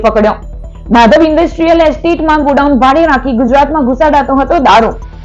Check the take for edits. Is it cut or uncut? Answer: uncut